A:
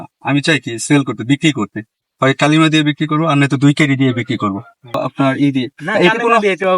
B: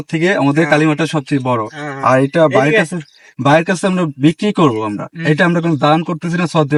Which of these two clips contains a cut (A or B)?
A